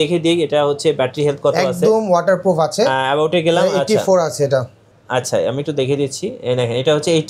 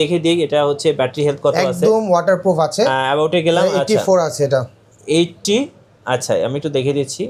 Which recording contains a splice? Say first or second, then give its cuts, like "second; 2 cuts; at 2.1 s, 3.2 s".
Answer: first; 1 cut; at 4.9 s